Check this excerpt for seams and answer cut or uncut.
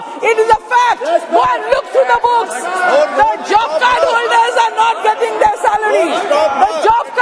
uncut